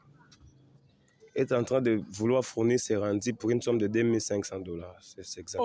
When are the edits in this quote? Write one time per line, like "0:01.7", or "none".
none